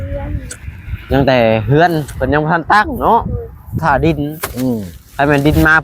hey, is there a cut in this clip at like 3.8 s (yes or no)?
yes